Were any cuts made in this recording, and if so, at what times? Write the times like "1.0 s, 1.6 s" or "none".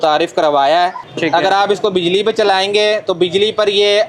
1.0 s